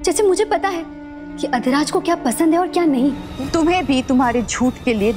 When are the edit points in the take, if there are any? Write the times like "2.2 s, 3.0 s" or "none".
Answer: 3.3 s